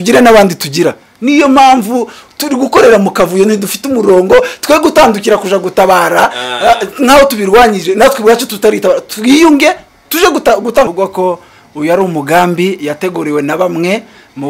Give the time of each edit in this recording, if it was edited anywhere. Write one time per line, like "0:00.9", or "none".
0:10.9